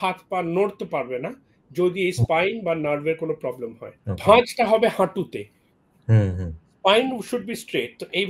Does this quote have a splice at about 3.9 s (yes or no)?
yes